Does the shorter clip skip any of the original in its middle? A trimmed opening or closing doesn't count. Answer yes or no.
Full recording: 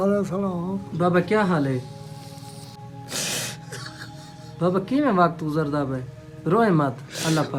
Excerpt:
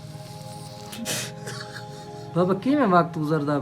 yes